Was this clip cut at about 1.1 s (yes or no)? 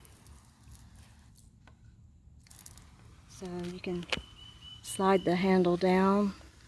no